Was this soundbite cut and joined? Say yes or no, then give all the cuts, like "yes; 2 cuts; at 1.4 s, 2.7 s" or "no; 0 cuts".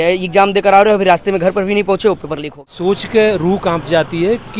yes; 1 cut; at 2.7 s